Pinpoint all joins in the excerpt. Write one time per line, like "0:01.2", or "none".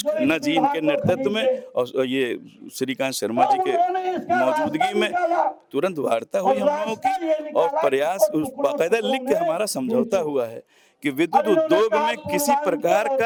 none